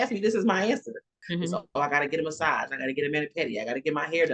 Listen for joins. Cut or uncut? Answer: cut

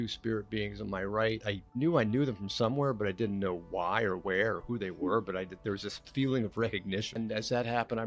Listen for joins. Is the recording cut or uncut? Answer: cut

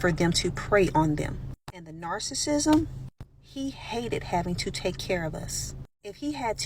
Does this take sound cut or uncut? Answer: cut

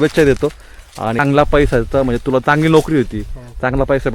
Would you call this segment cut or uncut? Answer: cut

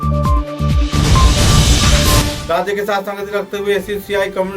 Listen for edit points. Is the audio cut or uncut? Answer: cut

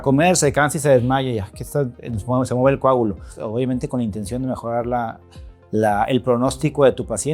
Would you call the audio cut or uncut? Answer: cut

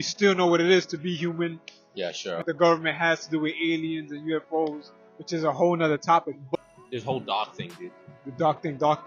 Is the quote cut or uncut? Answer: cut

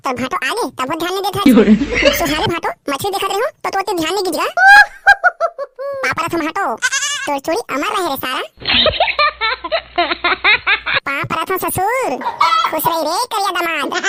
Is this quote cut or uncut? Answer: uncut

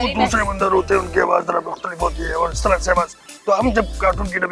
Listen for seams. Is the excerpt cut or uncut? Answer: uncut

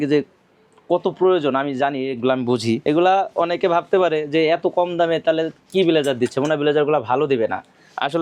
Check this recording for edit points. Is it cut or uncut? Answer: cut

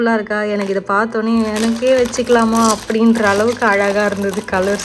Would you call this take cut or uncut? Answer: uncut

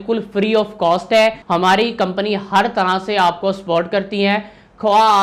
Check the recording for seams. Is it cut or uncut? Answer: cut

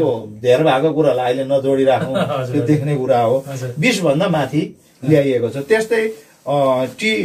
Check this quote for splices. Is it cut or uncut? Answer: uncut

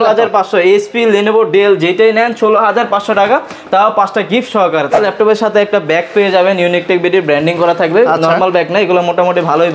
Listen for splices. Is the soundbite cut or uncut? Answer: cut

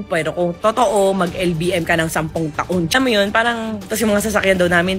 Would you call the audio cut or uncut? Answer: uncut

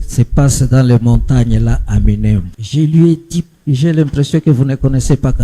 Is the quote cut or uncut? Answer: cut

